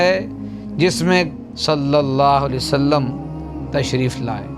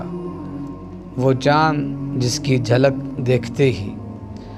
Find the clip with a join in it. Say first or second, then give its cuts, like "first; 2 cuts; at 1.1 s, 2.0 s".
first; 1 cut; at 1.4 s